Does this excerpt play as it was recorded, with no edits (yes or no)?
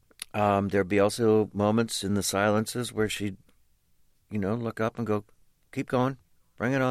no